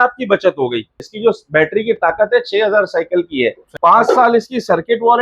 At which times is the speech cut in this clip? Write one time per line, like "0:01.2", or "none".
0:01.0
0:03.7

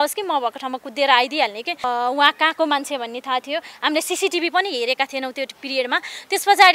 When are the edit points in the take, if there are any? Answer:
0:01.9

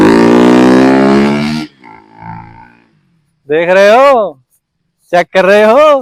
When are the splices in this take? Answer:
none

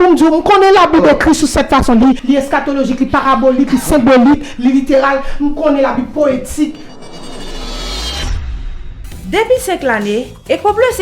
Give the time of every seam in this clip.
0:02.2
0:06.8

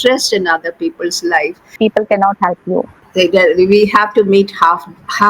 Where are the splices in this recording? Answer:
0:01.8
0:03.0

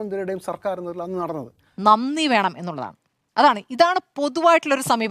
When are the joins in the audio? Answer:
0:01.7

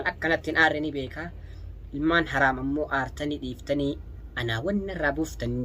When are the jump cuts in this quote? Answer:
none

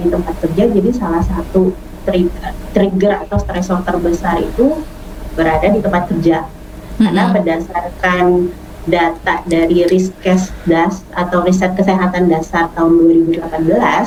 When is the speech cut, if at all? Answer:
none

